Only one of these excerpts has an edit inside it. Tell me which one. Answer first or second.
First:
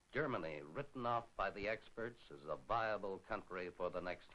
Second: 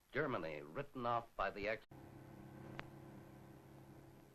first